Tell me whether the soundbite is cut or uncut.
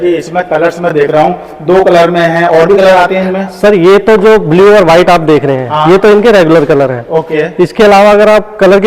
uncut